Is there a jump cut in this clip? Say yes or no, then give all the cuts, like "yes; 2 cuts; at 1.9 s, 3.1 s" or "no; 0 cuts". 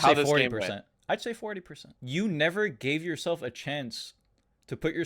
yes; 1 cut; at 1.9 s